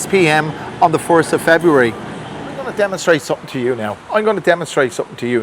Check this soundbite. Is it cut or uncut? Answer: cut